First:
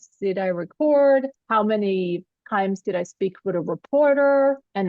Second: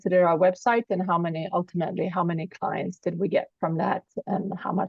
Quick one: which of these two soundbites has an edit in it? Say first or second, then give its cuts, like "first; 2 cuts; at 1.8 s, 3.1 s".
first; 1 cut; at 2.3 s